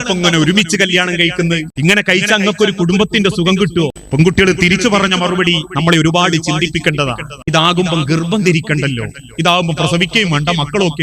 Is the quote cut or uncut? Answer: cut